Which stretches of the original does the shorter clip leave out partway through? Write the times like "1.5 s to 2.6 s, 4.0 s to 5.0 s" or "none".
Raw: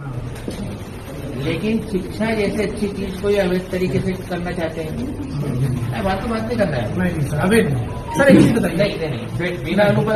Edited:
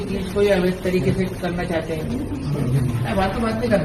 none